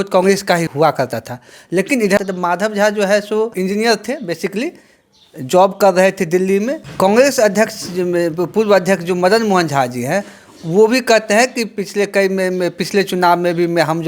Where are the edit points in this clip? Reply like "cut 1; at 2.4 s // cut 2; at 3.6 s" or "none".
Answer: cut 1; at 2.2 s // cut 2; at 6.9 s